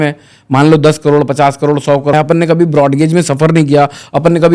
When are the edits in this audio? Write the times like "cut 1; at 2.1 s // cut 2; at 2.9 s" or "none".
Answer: cut 1; at 2.1 s